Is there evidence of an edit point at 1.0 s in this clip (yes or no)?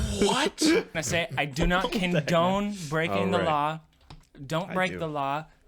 yes